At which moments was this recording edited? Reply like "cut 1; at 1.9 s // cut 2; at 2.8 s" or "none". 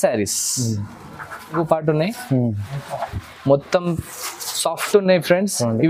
cut 1; at 1.5 s

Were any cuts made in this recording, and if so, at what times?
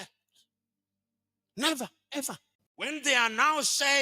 cut 1; at 2.9 s

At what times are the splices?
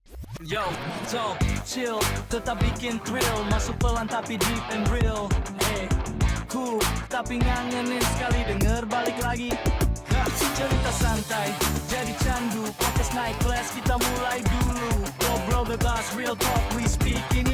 none

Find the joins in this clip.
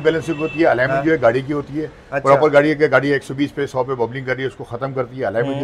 none

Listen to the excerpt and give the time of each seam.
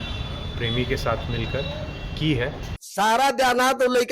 cut 1; at 2.8 s

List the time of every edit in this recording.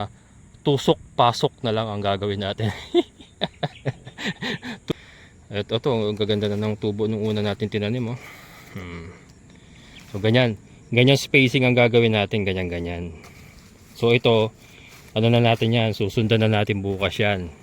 cut 1; at 4.9 s

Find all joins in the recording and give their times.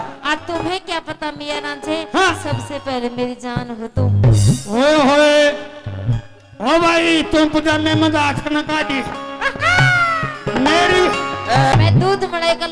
cut 1; at 11.7 s

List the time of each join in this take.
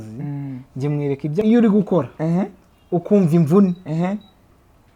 cut 1; at 1.4 s

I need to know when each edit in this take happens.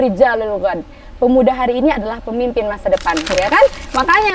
none

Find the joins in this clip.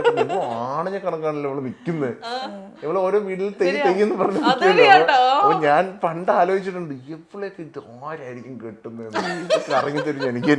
none

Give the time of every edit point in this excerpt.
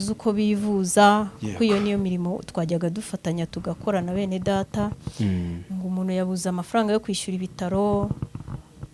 none

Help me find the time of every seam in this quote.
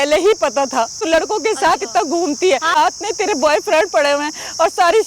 cut 1; at 1.0 s // cut 2; at 2.8 s

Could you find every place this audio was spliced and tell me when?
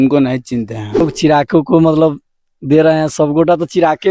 cut 1; at 1.0 s

